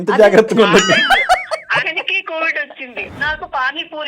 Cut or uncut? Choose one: cut